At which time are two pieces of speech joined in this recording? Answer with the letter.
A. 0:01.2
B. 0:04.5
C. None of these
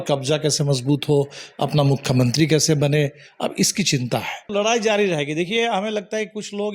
B